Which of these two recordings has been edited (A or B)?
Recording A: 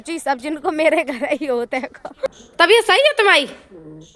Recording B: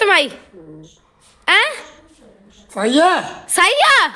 A